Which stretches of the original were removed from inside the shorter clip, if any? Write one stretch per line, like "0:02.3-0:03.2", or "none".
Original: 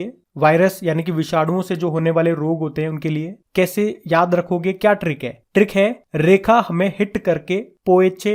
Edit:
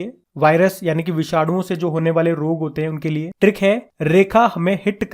0:03.3-0:05.4